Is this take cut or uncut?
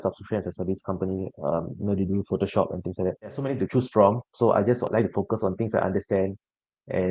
cut